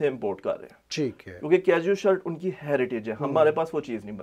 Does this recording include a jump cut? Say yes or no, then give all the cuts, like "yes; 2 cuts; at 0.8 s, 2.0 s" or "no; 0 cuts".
no; 0 cuts